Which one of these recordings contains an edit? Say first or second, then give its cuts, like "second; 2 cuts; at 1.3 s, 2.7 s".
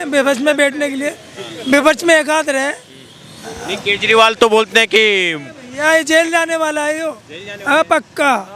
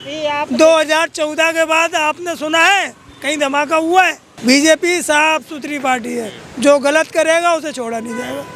second; 1 cut; at 4.3 s